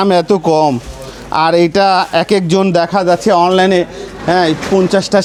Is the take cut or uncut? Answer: uncut